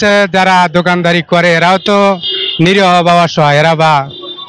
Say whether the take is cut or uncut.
uncut